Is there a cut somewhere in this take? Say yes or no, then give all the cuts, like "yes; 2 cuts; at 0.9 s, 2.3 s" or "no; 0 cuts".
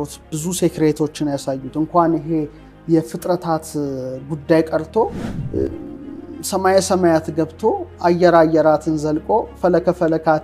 no; 0 cuts